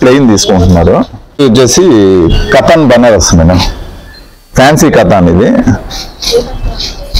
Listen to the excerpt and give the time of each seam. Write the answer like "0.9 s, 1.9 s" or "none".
1.2 s